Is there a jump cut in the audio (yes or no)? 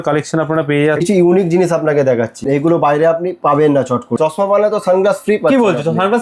yes